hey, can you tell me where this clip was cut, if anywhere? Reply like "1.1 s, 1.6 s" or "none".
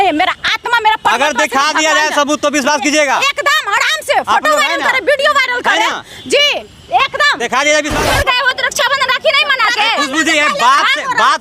8.0 s